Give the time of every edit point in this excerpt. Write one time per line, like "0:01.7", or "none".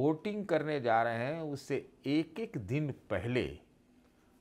none